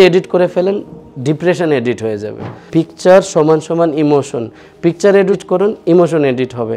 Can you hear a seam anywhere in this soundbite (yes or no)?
yes